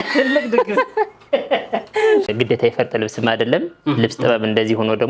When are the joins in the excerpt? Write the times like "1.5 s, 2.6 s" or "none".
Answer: 2.3 s